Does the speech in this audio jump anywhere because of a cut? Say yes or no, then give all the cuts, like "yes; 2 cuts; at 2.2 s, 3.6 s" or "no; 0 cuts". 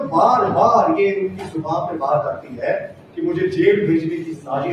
no; 0 cuts